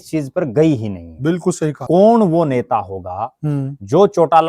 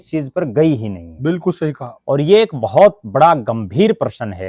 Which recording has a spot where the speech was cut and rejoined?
first; 1 cut; at 1.7 s

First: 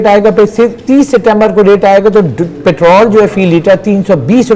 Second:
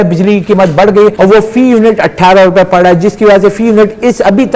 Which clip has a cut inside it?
second; 1 cut; at 1.1 s

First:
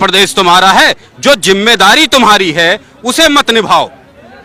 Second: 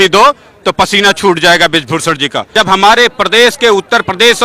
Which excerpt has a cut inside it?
second; 1 cut; at 2.5 s

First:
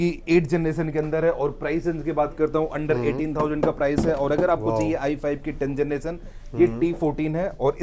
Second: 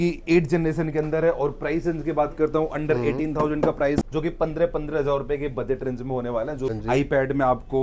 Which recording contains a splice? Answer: second; 2 cuts; at 4.0 s, 6.7 s

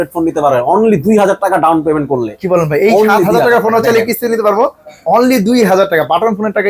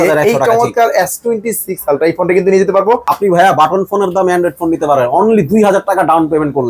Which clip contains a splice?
second; 1 cut; at 3.1 s

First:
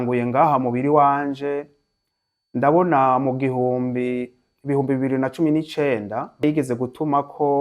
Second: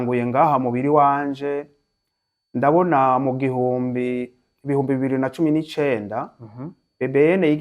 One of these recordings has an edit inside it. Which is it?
first; 1 cut; at 6.4 s

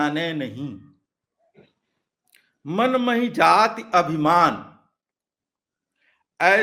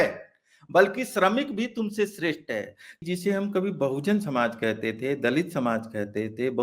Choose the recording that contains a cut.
second; 1 cut; at 3.0 s

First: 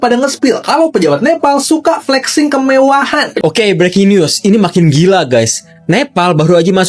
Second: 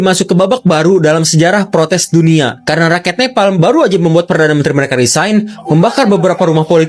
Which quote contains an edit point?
first; 1 cut; at 3.3 s

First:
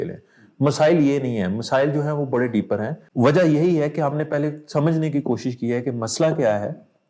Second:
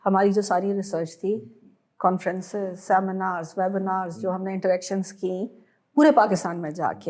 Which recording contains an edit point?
first; 1 cut; at 3.0 s

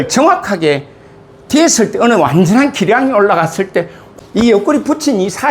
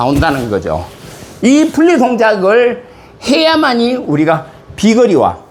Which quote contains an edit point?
first; 1 cut; at 4.0 s

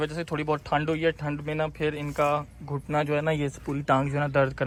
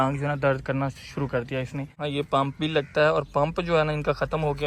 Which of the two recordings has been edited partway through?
second; 1 cut; at 2.0 s

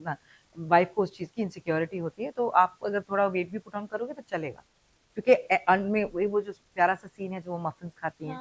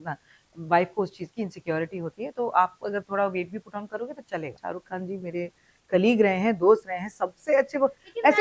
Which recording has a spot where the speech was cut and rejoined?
second; 1 cut; at 4.6 s

